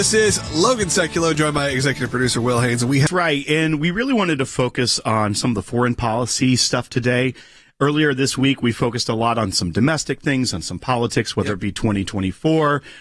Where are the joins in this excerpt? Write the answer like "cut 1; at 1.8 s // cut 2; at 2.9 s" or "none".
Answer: cut 1; at 3.1 s